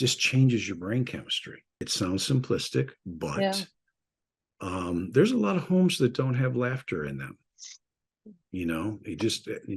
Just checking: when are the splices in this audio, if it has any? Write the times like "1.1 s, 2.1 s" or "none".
1.8 s